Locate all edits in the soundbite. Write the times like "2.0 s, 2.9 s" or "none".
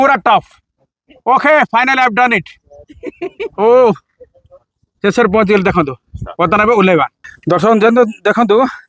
7.2 s